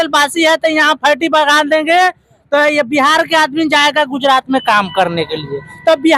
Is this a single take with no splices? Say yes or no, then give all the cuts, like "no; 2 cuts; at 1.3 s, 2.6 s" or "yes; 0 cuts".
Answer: yes; 0 cuts